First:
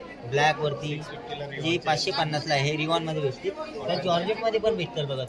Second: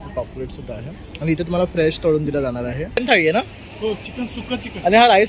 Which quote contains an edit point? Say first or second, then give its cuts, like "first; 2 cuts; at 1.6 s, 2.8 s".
second; 1 cut; at 3.0 s